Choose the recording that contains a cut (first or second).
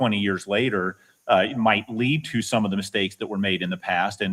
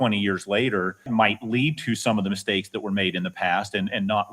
second